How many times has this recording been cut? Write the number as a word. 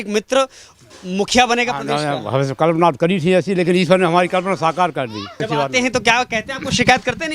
one